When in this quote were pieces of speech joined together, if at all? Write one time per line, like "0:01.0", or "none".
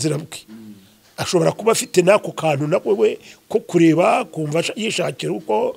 none